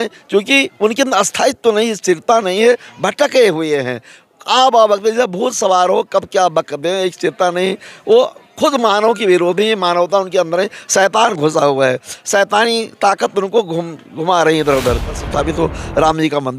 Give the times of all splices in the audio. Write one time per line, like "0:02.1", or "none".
0:15.2